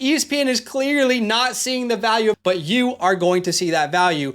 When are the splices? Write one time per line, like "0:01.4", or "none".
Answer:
0:02.4